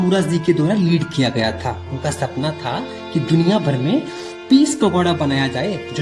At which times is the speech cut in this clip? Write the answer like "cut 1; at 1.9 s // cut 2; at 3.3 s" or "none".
none